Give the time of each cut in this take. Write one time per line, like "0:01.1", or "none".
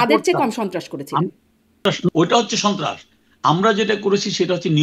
0:01.8